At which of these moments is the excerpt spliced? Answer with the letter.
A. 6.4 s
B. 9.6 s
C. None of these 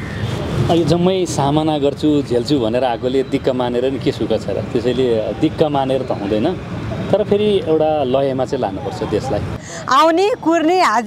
B